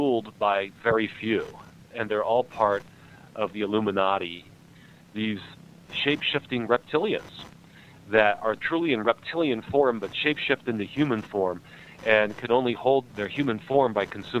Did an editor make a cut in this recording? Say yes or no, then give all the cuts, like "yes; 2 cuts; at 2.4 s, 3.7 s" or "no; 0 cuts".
yes; 6 cuts; at 1.8 s, 3.5 s, 4.7 s, 5.9 s, 8.6 s, 13.1 s